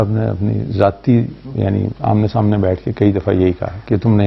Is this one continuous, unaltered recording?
yes; 0 cuts

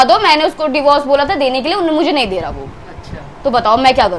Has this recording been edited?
no; 0 cuts

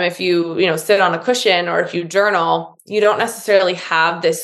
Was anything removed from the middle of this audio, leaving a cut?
no; 0 cuts

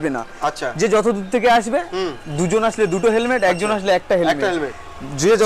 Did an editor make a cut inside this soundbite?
no; 0 cuts

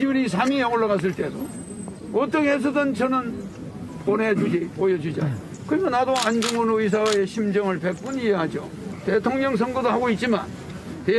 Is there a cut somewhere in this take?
yes; 2 cuts; at 5.5 s, 8.9 s

